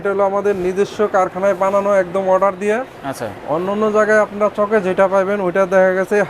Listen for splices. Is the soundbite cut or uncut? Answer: uncut